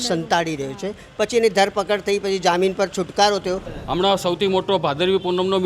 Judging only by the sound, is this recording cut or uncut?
cut